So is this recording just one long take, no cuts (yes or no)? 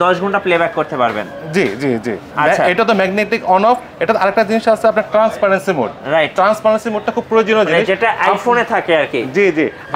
no